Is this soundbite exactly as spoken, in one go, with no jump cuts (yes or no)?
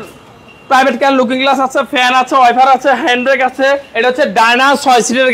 no